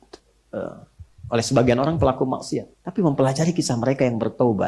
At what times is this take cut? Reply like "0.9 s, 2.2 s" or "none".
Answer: 2.8 s